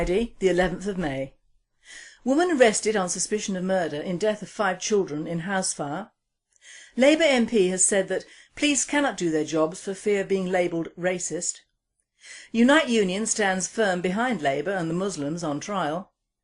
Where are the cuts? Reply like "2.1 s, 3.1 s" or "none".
2.5 s